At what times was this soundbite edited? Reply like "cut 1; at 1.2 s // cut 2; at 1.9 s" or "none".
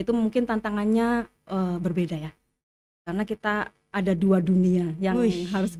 none